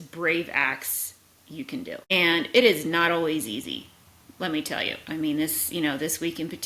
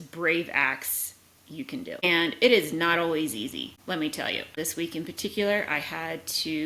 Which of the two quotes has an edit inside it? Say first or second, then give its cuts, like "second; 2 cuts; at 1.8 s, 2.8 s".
second; 3 cuts; at 2.0 s, 3.7 s, 4.5 s